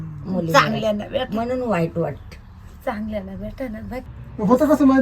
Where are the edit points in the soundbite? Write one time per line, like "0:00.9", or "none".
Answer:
0:04.1